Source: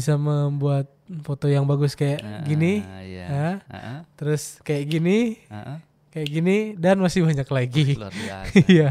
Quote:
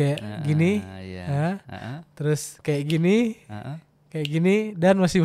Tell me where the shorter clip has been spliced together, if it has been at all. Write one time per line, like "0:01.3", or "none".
none